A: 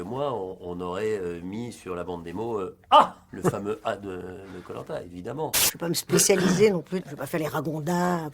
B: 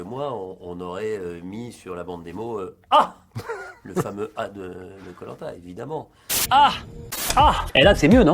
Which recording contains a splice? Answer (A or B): A